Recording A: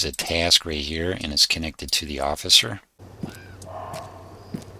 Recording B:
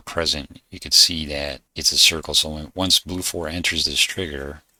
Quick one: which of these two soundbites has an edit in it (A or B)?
A